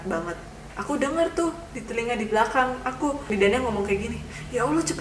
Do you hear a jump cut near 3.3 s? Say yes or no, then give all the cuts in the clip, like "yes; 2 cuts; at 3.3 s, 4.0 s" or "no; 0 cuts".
yes; 2 cuts; at 0.8 s, 3.3 s